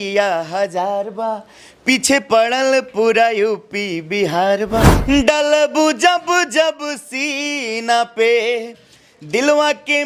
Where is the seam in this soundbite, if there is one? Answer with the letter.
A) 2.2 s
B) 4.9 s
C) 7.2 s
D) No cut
B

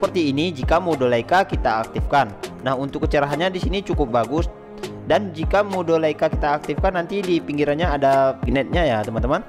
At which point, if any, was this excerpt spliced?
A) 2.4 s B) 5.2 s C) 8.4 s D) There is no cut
C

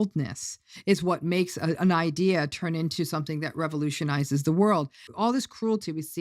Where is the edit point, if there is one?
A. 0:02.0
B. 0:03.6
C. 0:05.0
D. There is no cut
C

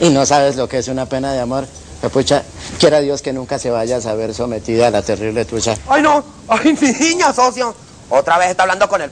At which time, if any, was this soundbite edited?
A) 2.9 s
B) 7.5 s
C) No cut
A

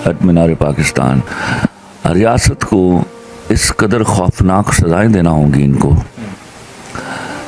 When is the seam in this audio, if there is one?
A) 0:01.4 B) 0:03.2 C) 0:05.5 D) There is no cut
A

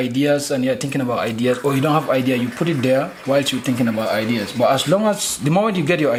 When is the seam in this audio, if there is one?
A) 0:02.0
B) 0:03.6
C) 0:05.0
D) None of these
D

